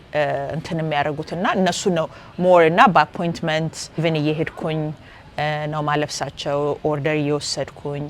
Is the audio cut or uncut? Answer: cut